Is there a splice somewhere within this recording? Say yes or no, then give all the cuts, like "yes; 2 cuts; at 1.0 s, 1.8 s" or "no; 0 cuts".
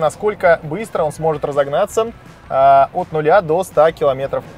no; 0 cuts